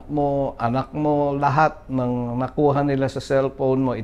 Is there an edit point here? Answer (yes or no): no